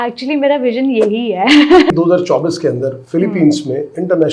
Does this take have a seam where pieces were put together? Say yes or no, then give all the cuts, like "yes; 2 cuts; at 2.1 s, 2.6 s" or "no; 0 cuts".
yes; 1 cut; at 1.9 s